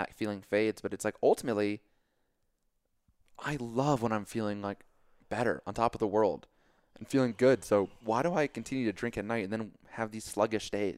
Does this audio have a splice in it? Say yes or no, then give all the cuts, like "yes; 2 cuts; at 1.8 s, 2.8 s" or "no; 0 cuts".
no; 0 cuts